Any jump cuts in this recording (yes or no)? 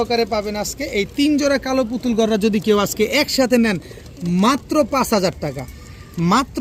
no